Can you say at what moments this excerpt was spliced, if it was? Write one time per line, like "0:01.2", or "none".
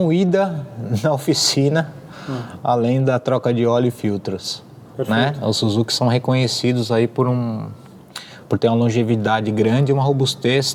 none

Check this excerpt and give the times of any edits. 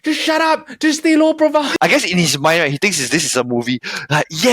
0:01.7

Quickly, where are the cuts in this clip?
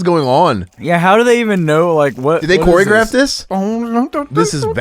0:03.4

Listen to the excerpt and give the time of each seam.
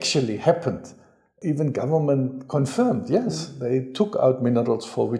0:01.3

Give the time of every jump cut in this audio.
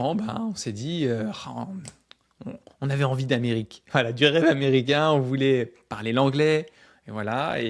none

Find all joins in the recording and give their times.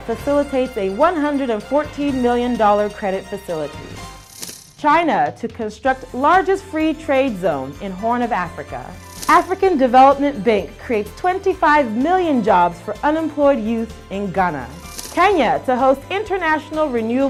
none

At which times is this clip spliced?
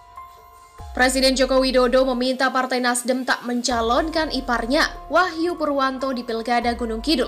0:00.9

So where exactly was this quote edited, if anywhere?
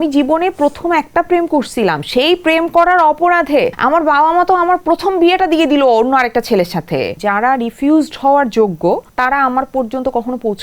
0:03.8
0:07.1
0:09.1

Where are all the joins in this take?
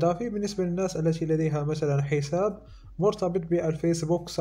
none

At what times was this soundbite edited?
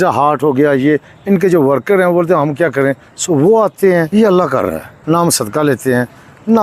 0:04.5

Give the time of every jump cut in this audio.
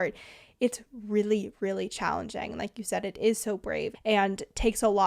0:03.9

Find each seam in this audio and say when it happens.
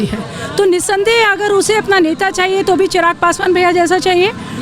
none

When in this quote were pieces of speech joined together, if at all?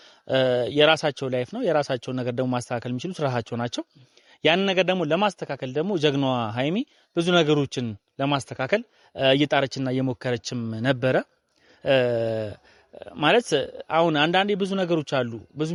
none

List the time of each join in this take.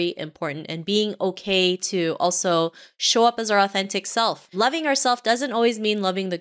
0:04.4

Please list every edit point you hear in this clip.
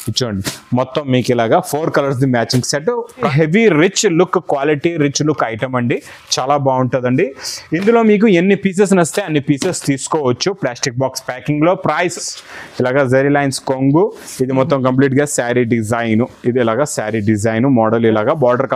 0:03.3
0:12.2

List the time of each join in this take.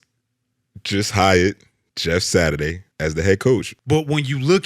0:02.9
0:03.7

